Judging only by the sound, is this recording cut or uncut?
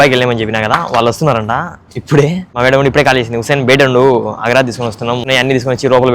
cut